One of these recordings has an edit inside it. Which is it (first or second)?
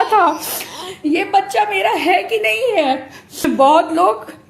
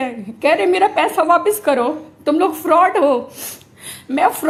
first